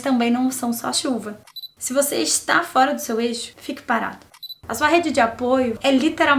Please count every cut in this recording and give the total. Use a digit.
2